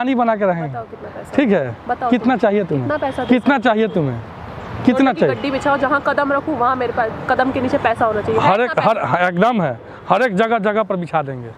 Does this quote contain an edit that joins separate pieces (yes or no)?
no